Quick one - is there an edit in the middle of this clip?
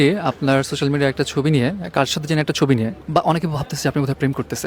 yes; 1 cut; at 3.0 s

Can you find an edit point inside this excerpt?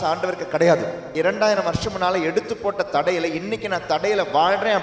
yes; 1 cut; at 1.1 s

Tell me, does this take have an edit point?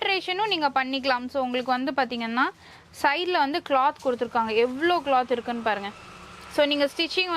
no; 0 cuts

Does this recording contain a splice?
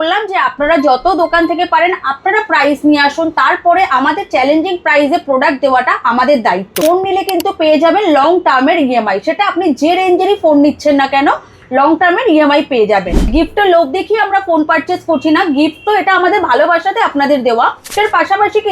yes; 3 cuts; at 6.8 s, 13.3 s, 17.9 s

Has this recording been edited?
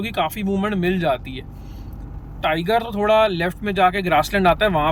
no; 0 cuts

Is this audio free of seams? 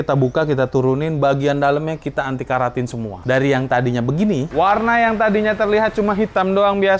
no; 1 cut; at 4.5 s

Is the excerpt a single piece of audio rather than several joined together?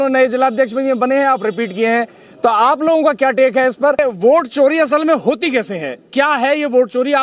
no; 1 cut; at 4.0 s

